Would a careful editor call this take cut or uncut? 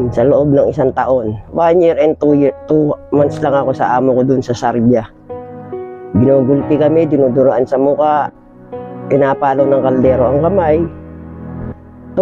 uncut